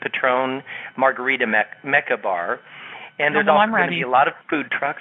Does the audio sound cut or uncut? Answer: cut